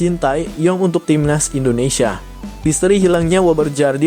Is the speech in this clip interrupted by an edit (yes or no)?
yes